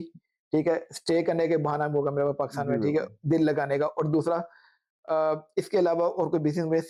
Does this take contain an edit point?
no; 0 cuts

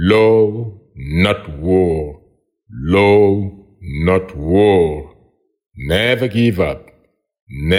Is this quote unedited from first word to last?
yes; 0 cuts

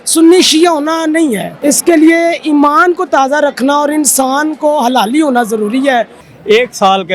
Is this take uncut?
no; 2 cuts; at 1.5 s, 6.2 s

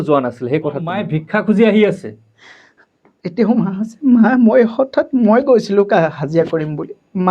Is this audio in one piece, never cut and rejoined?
no; 1 cut; at 1.1 s

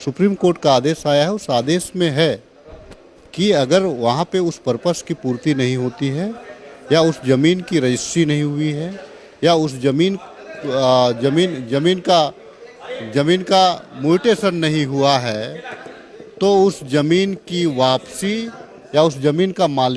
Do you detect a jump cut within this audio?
no; 0 cuts

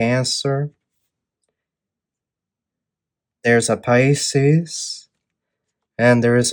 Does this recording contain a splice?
no; 0 cuts

